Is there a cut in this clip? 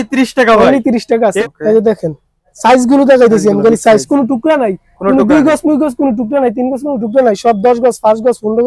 yes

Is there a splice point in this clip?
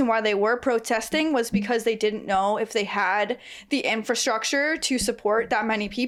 no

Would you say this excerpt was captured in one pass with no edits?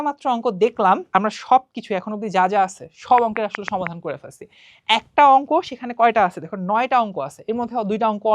no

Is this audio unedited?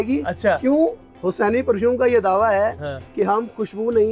yes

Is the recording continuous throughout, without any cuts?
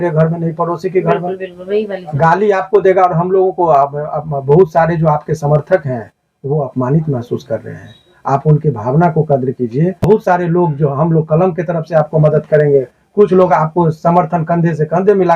no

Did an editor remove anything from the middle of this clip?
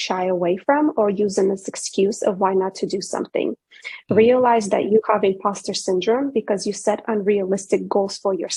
no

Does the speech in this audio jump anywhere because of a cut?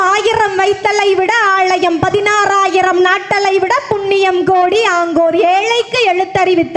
no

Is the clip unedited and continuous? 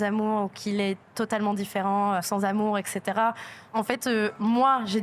no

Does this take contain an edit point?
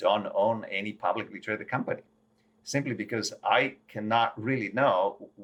no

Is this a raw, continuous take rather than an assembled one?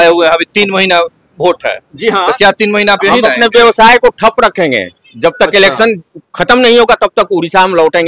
yes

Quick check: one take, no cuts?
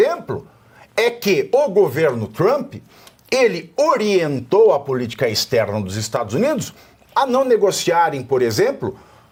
yes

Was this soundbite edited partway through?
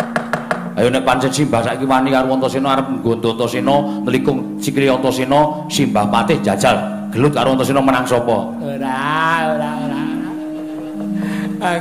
yes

